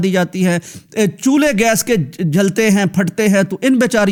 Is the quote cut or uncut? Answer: uncut